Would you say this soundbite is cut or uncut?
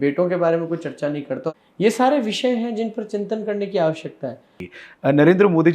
cut